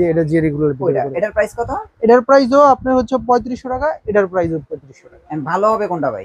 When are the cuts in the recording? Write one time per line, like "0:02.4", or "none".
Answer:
none